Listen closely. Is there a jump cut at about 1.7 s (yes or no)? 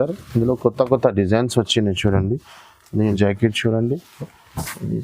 no